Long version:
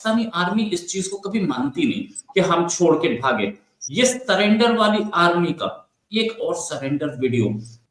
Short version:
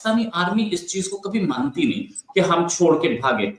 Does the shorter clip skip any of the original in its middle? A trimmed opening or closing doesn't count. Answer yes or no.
no